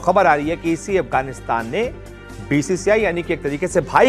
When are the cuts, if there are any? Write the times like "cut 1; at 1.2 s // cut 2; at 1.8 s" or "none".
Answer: none